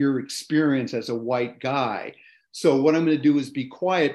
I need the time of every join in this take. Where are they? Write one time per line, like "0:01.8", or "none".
none